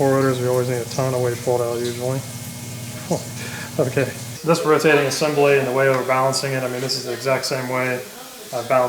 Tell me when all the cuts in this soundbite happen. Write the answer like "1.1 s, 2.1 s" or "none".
4.3 s